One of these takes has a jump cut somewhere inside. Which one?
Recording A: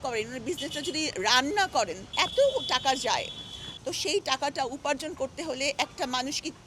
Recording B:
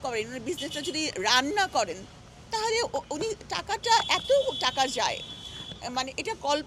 A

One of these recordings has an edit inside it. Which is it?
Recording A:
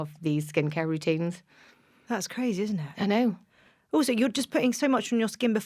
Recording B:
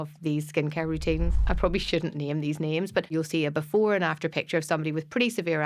B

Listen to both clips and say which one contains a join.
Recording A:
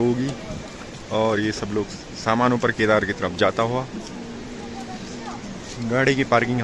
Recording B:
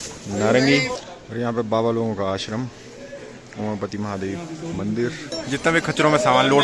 B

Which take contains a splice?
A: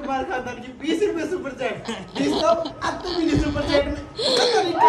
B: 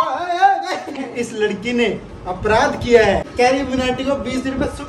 B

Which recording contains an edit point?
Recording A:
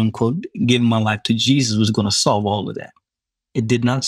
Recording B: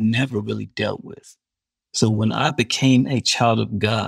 B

